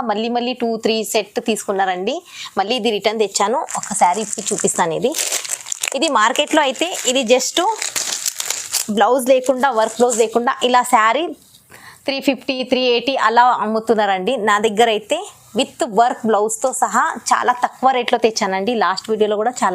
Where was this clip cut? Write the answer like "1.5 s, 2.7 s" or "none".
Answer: none